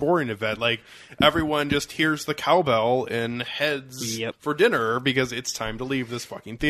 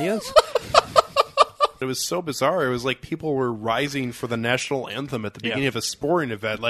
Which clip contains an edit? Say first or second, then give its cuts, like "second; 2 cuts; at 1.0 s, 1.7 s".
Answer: second; 1 cut; at 1.8 s